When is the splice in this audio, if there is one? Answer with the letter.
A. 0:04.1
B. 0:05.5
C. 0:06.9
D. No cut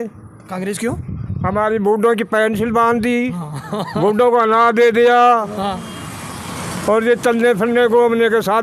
D